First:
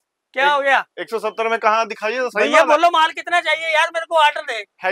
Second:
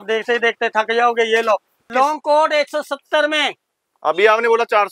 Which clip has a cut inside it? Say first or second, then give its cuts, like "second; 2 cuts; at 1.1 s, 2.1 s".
second; 1 cut; at 1.9 s